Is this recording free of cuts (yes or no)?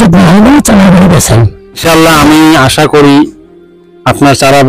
no